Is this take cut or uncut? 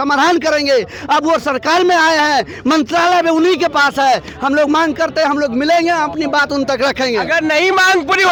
uncut